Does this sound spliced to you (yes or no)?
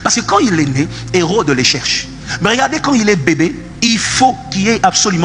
no